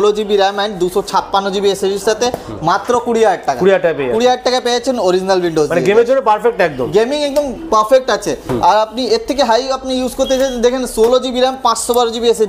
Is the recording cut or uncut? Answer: uncut